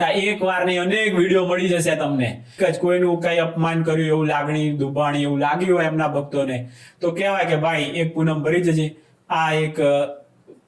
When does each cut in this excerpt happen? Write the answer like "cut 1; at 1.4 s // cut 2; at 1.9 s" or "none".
cut 1; at 2.5 s